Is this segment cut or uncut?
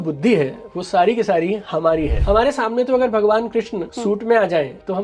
cut